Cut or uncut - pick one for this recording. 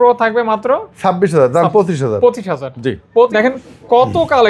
cut